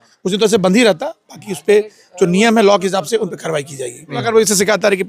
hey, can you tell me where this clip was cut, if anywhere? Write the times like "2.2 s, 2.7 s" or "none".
4.1 s